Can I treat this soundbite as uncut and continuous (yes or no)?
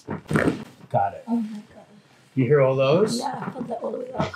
yes